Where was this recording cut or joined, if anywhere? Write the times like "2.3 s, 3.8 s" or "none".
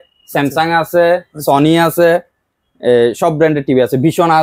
none